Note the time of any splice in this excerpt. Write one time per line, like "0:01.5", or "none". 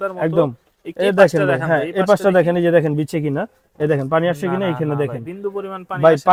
none